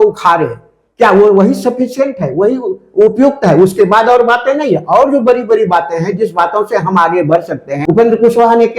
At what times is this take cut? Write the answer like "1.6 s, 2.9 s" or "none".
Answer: 7.7 s